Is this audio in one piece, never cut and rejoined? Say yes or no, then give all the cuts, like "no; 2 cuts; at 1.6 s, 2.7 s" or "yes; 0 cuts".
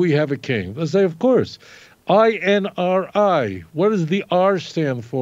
yes; 0 cuts